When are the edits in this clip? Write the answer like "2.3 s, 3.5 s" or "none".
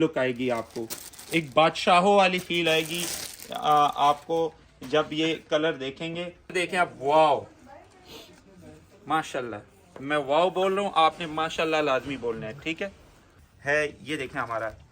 6.5 s, 13.3 s

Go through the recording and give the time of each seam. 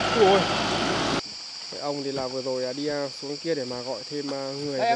1.2 s

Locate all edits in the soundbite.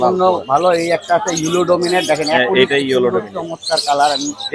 none

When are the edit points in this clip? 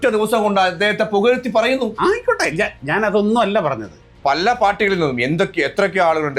4.1 s

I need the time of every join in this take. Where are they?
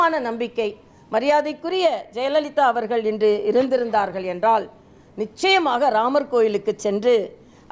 none

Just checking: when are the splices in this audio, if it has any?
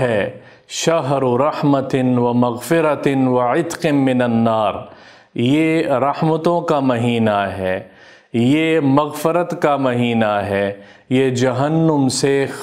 none

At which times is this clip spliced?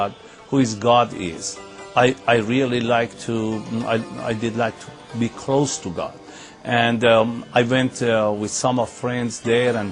7.7 s

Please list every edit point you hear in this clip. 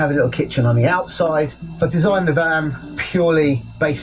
1.6 s

